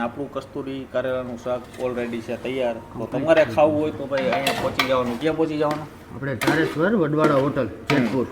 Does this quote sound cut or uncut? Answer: uncut